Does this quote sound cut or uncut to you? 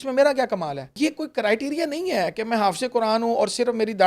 cut